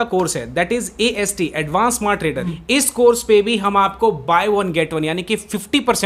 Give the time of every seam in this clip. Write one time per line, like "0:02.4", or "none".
0:02.4